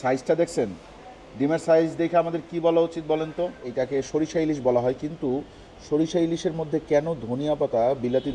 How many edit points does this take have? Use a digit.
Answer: 1